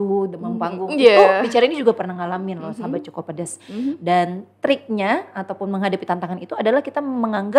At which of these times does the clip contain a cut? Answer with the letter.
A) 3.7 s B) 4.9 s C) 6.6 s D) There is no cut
D